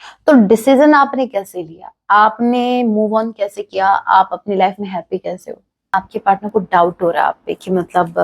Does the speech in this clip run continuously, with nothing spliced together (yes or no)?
no